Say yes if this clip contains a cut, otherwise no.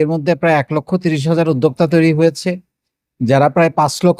no